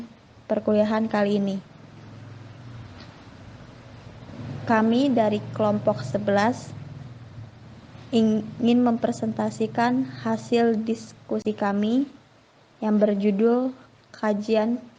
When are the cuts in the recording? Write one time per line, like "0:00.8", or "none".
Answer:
none